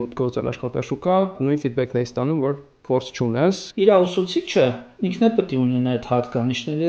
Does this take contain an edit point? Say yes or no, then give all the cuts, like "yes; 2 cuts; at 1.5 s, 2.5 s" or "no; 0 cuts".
yes; 2 cuts; at 1.4 s, 3.7 s